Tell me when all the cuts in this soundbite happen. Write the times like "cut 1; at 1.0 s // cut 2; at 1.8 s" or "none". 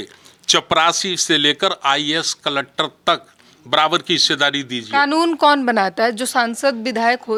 none